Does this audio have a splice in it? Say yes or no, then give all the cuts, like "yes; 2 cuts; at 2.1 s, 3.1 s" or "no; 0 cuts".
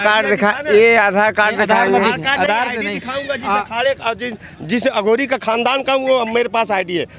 no; 0 cuts